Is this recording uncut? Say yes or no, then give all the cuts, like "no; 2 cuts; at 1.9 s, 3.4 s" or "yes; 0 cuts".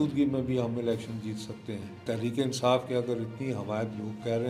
no; 1 cut; at 2.0 s